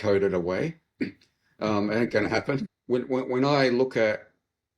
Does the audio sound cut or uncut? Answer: cut